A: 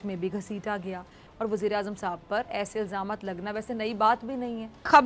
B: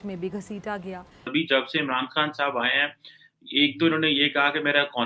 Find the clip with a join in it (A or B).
B